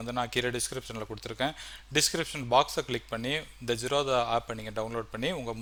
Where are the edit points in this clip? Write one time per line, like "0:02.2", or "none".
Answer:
none

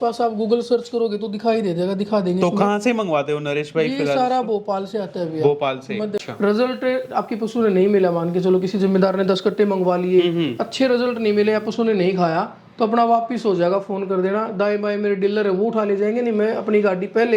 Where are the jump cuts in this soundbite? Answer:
0:06.3

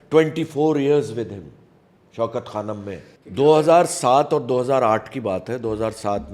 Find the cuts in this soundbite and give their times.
none

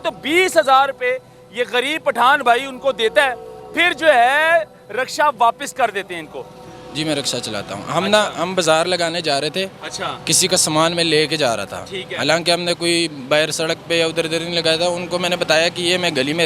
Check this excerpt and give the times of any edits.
0:06.7

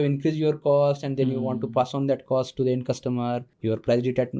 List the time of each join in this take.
0:03.5

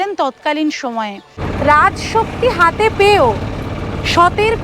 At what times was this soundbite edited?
0:01.4

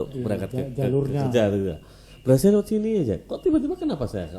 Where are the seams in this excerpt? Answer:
none

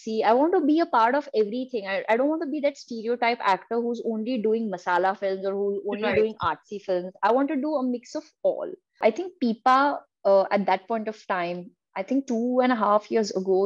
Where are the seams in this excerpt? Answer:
0:09.0

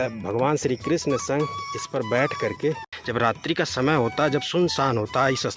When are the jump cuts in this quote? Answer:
0:02.9

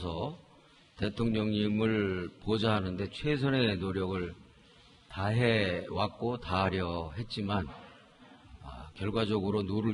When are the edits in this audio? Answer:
0:02.9

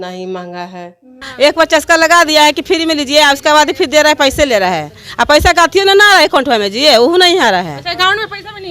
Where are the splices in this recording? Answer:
0:01.2

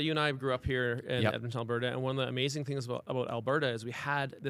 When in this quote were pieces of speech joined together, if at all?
none

